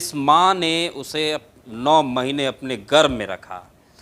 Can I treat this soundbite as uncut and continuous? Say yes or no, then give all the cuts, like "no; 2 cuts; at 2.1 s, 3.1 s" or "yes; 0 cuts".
yes; 0 cuts